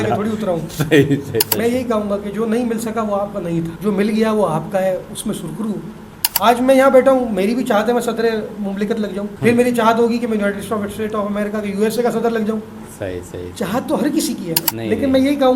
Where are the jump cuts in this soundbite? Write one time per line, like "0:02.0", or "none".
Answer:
0:01.5
0:03.7
0:06.2
0:09.3
0:14.6